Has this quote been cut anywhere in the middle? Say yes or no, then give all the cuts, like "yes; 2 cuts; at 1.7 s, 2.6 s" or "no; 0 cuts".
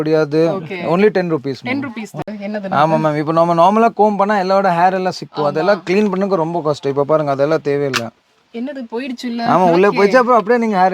yes; 1 cut; at 2.1 s